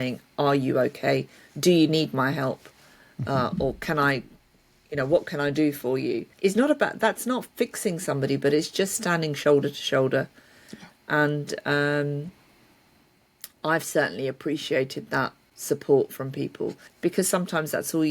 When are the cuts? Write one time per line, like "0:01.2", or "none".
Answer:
0:06.3
0:15.5
0:16.8